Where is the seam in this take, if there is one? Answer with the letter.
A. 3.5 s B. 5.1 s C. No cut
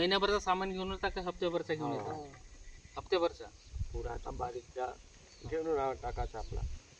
C